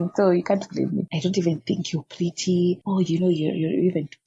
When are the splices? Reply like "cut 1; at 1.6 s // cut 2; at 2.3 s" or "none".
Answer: cut 1; at 1.1 s // cut 2; at 2.8 s

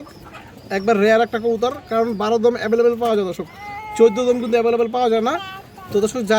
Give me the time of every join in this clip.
none

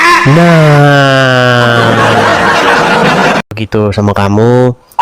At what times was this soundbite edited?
cut 1; at 3.4 s

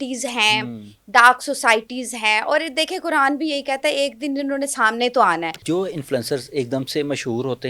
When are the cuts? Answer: cut 1; at 5.6 s

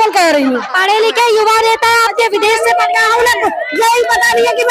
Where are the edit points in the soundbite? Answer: none

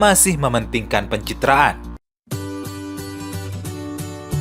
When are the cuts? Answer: cut 1; at 1.9 s

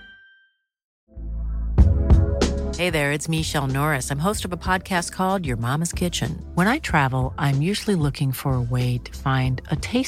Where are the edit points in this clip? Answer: cut 1; at 1.0 s

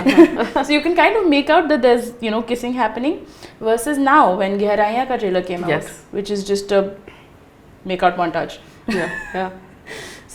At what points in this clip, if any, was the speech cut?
none

